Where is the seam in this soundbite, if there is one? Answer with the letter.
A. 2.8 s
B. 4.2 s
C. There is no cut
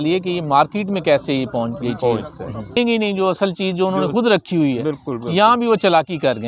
A